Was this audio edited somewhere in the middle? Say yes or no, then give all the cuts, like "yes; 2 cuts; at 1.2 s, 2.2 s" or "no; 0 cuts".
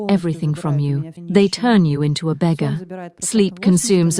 yes; 1 cut; at 1.1 s